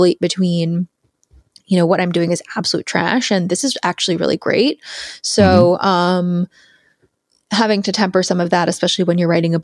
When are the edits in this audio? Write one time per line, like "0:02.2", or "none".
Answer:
none